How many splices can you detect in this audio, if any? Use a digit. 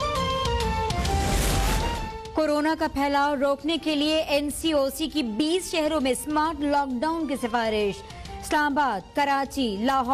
1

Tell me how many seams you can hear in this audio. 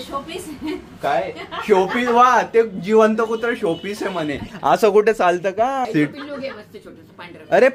1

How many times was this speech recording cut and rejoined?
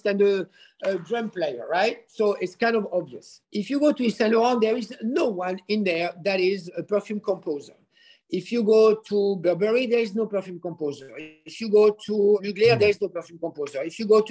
1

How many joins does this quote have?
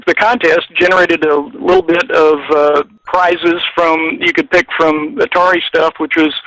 1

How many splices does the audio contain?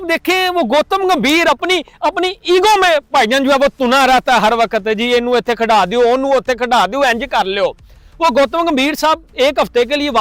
0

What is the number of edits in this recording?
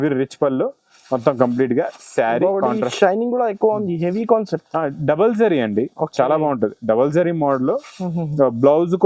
0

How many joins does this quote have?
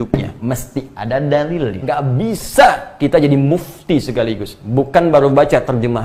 1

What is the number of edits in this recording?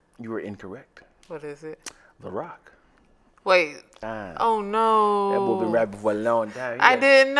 1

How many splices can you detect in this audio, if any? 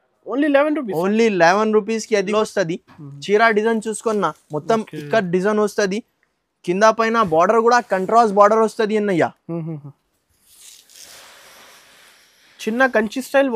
1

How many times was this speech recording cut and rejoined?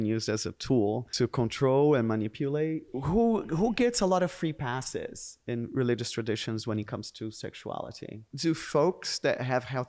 3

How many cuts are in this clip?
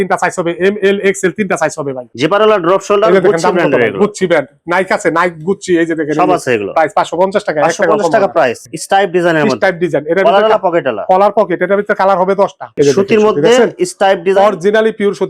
3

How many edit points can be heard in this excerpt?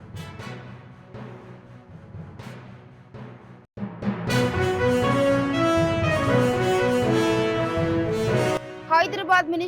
0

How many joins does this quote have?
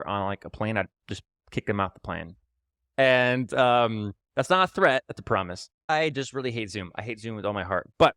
1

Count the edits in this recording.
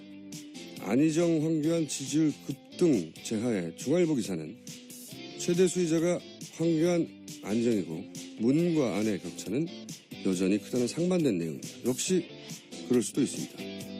1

